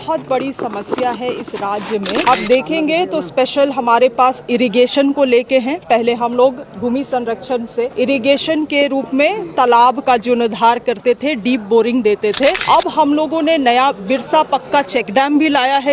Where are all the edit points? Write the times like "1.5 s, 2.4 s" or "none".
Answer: 2.3 s, 7.9 s, 12.6 s